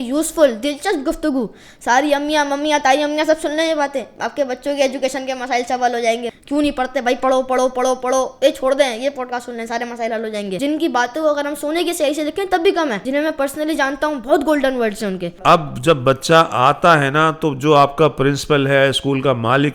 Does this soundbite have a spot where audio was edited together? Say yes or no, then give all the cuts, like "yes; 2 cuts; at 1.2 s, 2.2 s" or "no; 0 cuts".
yes; 4 cuts; at 6.3 s, 10.5 s, 13.0 s, 15.3 s